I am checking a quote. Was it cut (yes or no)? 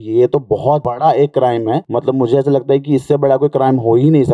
yes